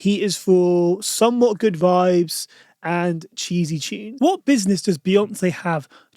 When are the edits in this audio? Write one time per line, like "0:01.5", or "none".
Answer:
0:04.0